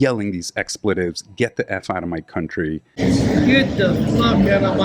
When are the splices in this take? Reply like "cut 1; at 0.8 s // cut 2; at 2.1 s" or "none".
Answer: none